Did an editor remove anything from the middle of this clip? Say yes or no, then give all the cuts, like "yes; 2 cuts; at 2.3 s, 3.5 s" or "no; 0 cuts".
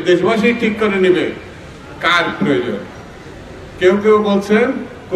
no; 0 cuts